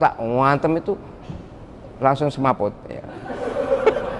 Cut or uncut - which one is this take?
uncut